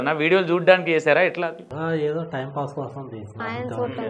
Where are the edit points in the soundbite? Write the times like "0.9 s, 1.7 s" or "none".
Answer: 1.7 s